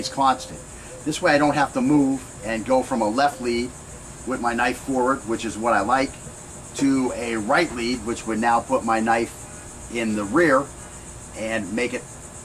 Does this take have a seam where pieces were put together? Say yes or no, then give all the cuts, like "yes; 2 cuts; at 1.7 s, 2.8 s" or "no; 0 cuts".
yes; 1 cut; at 5.3 s